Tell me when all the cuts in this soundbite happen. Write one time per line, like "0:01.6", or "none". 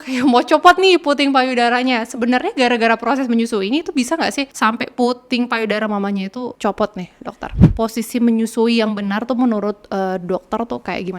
0:04.5
0:06.5
0:07.6